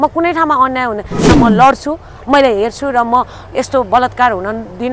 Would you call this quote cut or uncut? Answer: cut